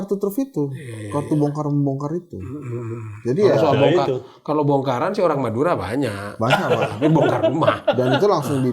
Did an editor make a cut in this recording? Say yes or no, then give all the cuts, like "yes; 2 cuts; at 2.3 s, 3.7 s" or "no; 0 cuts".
no; 0 cuts